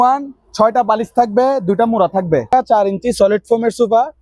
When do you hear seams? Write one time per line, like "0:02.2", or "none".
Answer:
0:02.5